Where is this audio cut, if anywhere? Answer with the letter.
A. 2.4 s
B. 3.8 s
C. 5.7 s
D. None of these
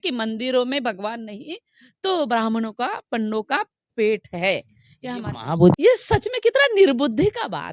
C